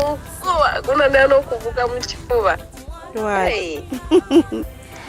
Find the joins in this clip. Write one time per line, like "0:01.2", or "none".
none

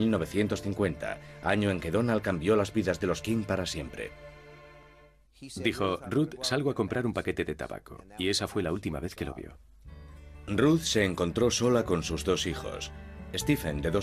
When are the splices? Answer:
none

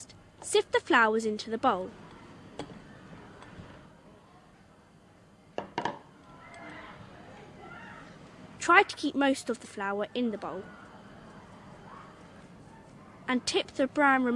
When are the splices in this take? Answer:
0:11.3

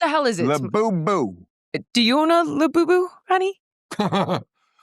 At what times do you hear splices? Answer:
0:01.5

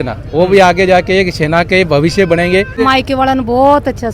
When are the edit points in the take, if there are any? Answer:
0:02.8

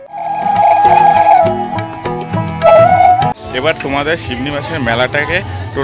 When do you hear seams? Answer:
0:03.3

